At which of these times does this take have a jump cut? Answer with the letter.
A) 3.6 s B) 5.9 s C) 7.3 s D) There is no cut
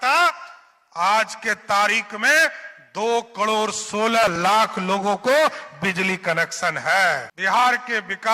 C